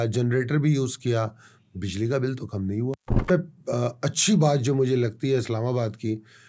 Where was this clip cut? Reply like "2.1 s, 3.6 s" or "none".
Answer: 3.3 s